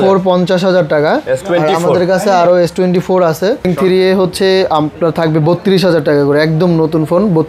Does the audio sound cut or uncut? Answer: cut